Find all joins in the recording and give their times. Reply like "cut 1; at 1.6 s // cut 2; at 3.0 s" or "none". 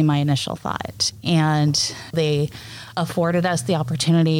cut 1; at 2.1 s